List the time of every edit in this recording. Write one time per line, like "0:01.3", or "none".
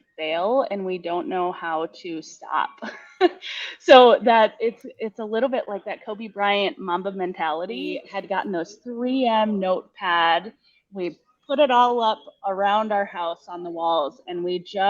0:08.1